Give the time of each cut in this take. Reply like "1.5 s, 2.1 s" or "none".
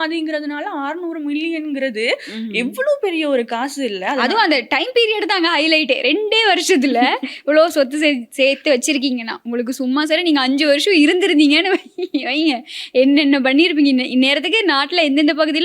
none